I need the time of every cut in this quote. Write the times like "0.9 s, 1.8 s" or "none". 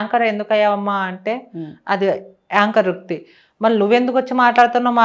none

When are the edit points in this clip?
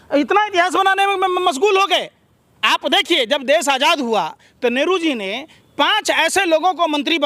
none

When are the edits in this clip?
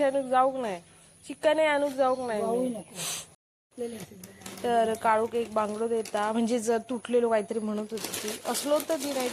3.3 s

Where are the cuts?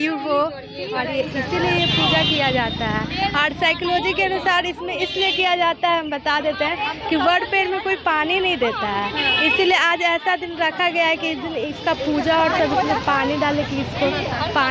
none

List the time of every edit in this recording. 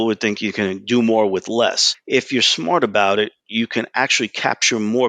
1.9 s

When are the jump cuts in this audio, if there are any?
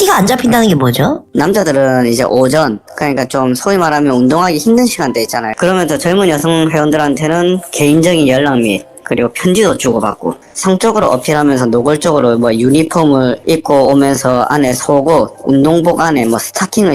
5.5 s, 10.5 s

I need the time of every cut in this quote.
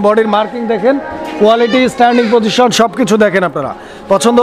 none

